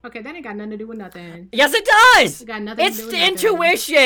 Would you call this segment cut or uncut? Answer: uncut